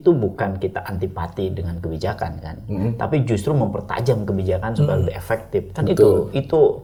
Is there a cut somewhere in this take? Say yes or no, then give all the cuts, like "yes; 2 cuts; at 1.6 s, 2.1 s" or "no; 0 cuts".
no; 0 cuts